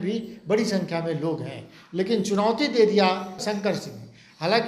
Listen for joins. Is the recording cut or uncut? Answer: cut